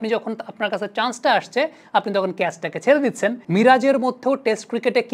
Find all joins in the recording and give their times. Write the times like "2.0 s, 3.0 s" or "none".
3.4 s